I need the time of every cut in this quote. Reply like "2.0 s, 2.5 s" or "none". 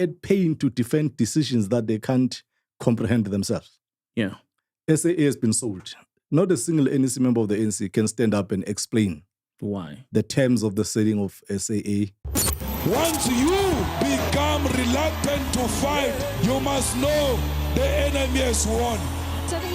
12.2 s